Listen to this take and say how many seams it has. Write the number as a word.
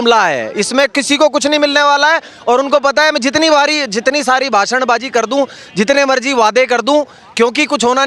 zero